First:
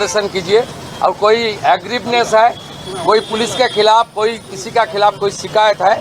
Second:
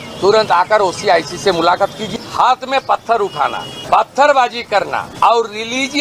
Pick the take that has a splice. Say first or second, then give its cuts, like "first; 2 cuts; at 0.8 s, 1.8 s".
second; 3 cuts; at 2.0 s, 3.7 s, 5.1 s